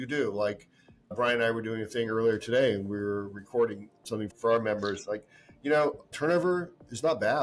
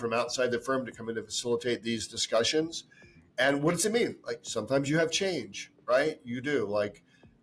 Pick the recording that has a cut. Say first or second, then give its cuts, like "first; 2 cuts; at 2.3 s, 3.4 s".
first; 1 cut; at 4.3 s